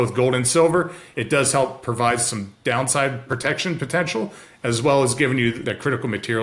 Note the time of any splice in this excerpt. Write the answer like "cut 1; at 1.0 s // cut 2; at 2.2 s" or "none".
cut 1; at 3.3 s // cut 2; at 5.6 s